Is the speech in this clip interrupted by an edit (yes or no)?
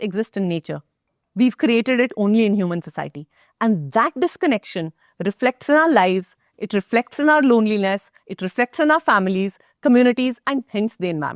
no